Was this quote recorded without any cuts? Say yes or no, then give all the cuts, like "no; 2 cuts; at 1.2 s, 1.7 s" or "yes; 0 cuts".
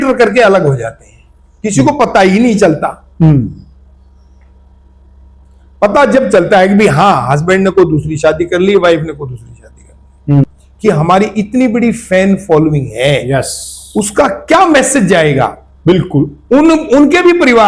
no; 1 cut; at 10.4 s